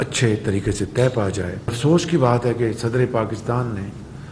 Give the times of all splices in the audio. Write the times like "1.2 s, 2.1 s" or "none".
1.8 s